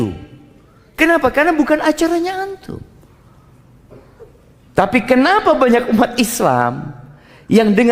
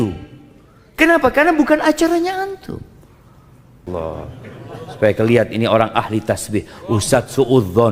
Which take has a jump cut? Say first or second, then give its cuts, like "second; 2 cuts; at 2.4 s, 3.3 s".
second; 1 cut; at 3.9 s